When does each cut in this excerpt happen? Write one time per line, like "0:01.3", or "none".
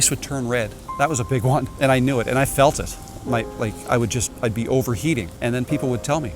0:01.7
0:05.3